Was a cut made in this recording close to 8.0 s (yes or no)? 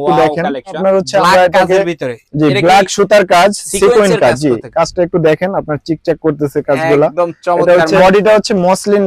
yes